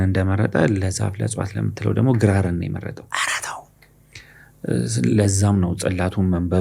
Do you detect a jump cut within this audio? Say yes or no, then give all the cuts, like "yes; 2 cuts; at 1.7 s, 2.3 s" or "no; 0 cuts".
no; 0 cuts